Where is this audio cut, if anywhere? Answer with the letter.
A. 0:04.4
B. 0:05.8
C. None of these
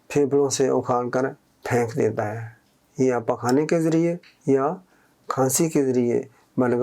C